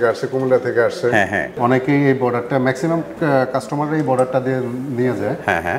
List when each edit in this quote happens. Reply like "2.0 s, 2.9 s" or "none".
1.5 s

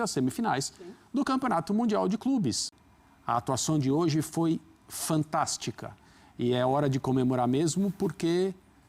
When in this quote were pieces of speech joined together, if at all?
2.7 s

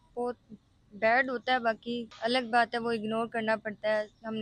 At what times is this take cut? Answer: 2.1 s

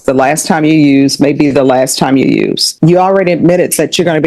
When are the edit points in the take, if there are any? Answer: 2.6 s

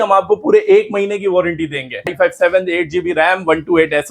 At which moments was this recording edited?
2.1 s

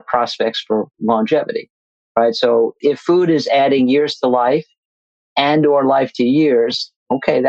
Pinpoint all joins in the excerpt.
2.8 s

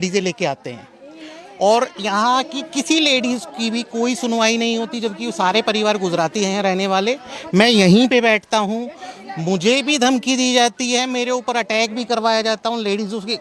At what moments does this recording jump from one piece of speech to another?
none

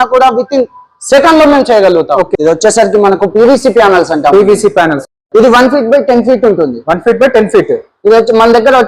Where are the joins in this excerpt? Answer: 2.3 s

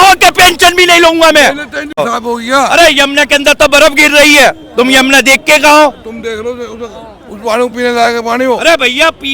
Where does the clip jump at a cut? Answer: 2.0 s

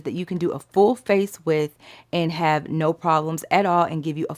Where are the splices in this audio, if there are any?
none

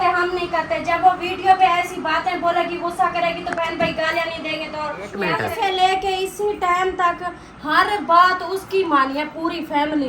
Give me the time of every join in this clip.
5.3 s

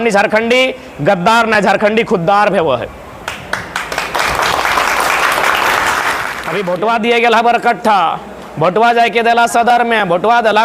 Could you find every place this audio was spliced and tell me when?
6.4 s

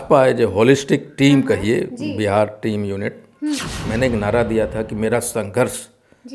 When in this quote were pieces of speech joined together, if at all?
3.7 s

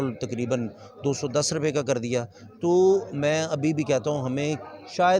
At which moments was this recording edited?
none

